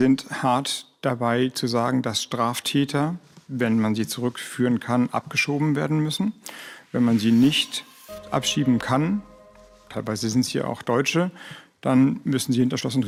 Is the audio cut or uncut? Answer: uncut